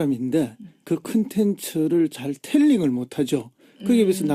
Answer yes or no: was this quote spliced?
yes